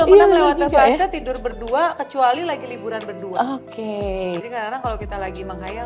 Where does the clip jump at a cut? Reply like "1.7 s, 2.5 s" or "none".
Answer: 4.4 s